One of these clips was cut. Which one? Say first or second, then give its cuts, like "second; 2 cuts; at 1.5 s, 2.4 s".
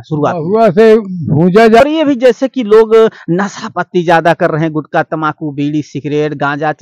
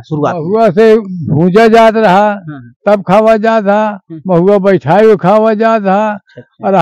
first; 1 cut; at 1.8 s